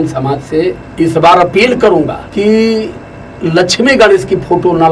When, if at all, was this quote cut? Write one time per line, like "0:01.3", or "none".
0:00.8
0:02.2